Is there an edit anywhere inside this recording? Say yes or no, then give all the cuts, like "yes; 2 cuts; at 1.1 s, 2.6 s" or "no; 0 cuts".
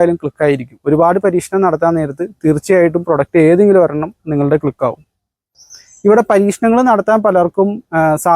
yes; 1 cut; at 5.4 s